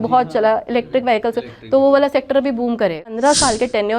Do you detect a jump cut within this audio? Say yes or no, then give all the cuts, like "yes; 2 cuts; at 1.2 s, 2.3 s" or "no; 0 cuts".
yes; 1 cut; at 3.1 s